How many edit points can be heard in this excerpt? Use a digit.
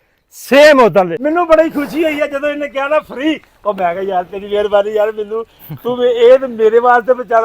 1